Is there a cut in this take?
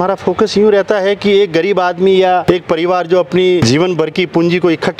yes; 2 cuts; at 2.4 s, 3.6 s

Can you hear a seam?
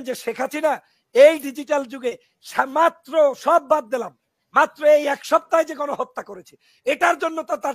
no; 0 cuts

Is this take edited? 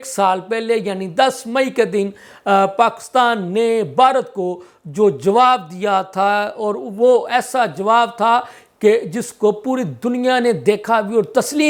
no; 0 cuts

